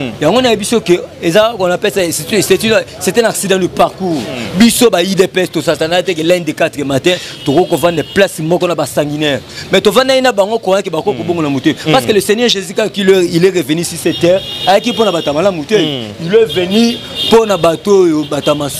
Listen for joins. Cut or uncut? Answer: uncut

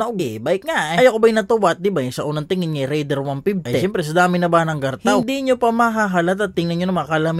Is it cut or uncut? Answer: uncut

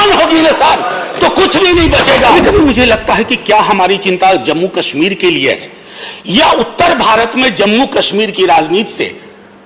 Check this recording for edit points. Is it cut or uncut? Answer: cut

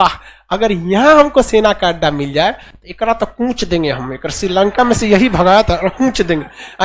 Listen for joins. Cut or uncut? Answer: uncut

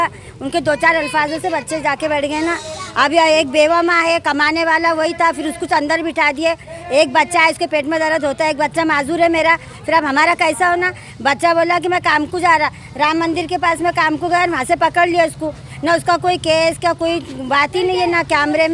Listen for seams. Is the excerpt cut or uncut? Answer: uncut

